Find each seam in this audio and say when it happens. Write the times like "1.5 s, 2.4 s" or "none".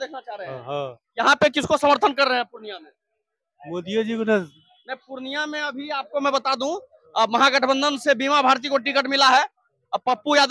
none